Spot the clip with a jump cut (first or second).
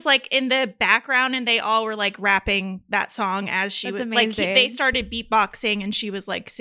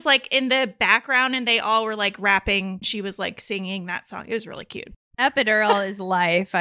second